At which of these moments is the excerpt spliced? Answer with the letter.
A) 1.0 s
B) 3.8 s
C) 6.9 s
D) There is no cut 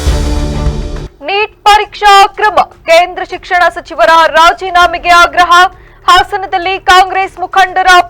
A